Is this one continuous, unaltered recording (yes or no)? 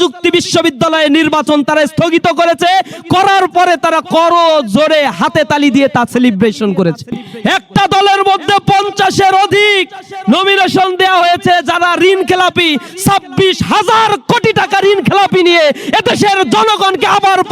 no